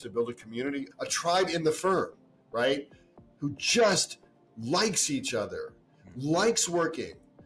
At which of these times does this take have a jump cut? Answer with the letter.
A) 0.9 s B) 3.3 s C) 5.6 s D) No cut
A